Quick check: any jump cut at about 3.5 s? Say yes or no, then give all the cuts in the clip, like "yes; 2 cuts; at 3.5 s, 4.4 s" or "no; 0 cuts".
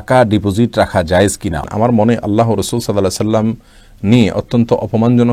no; 1 cut; at 1.6 s